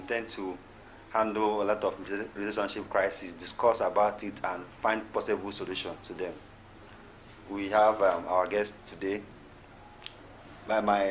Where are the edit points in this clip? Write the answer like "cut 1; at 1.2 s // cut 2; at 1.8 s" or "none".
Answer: none